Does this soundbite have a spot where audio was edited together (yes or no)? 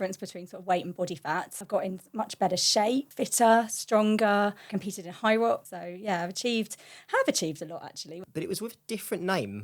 yes